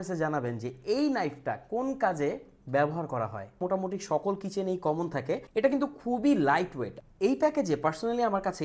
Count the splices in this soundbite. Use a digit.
3